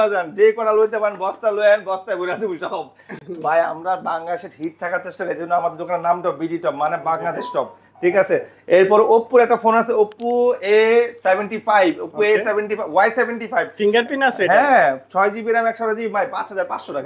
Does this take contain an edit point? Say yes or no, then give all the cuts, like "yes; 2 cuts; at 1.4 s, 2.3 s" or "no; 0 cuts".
no; 0 cuts